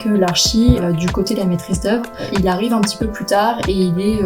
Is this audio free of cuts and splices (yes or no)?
no